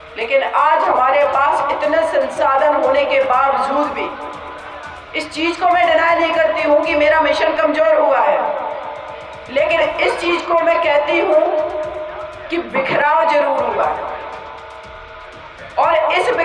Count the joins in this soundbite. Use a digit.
0